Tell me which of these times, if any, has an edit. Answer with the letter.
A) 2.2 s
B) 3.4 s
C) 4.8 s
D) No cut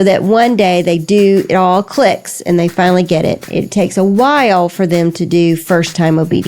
D